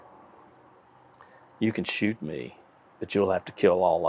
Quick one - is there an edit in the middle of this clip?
no; 0 cuts

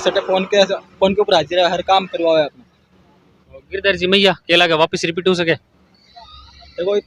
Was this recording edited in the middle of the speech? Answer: no; 0 cuts

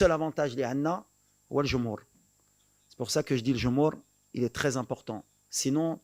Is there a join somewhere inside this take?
no; 0 cuts

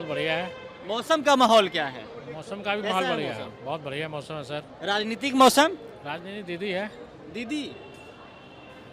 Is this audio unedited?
yes; 0 cuts

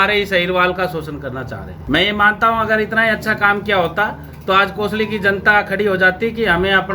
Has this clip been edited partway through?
yes; 1 cut; at 1.7 s

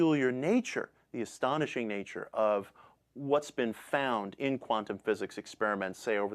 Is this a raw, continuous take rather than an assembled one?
no; 1 cut; at 2.9 s

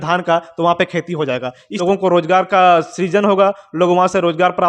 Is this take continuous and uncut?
no; 1 cut; at 1.6 s

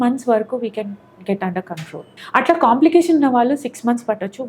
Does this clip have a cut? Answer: yes; 1 cut; at 2.2 s

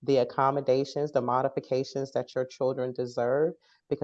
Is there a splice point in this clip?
no; 0 cuts

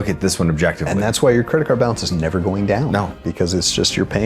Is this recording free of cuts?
yes; 0 cuts

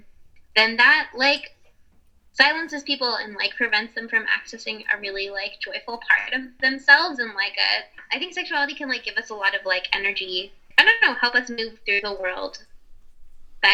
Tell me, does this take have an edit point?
yes; 1 cut; at 10.7 s

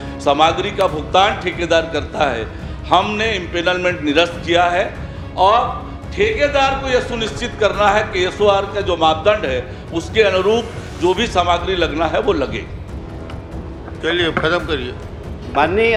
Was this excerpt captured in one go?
yes; 0 cuts

